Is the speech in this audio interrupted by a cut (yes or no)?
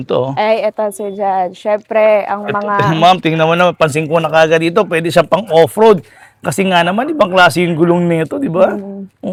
no